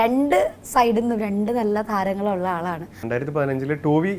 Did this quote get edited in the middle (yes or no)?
yes